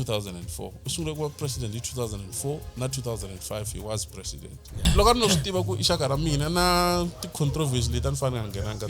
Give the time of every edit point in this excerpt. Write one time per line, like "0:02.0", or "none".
0:04.8